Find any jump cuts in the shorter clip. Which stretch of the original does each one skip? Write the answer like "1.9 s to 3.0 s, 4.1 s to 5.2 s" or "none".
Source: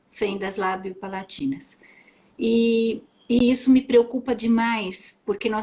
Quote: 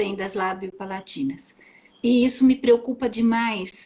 2.1 s to 3.1 s